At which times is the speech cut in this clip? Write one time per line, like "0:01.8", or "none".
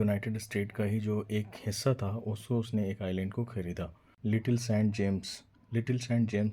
0:04.0